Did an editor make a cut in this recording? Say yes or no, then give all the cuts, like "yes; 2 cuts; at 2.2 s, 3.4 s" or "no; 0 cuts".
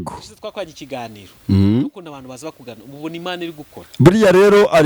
no; 0 cuts